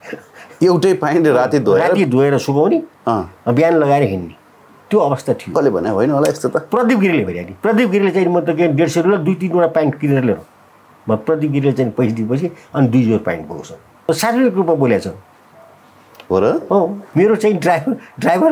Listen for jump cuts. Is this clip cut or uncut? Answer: cut